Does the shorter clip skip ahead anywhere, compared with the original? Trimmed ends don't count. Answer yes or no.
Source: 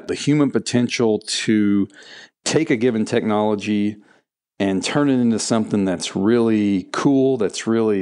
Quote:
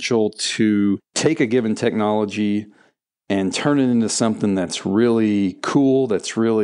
yes